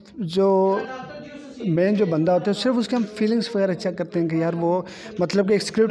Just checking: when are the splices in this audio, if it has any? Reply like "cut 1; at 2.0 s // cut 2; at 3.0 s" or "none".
none